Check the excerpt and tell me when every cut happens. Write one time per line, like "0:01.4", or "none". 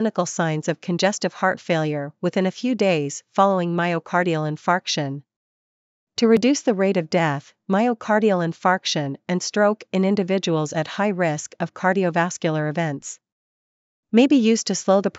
none